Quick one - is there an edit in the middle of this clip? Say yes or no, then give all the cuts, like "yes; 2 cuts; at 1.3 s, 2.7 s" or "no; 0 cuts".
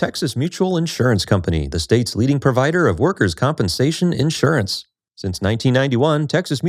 no; 0 cuts